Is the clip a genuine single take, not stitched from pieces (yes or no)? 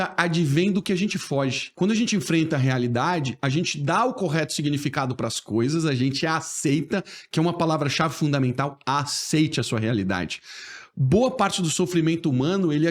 no